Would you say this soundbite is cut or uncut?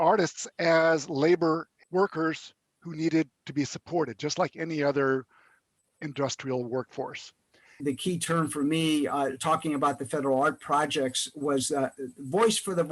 cut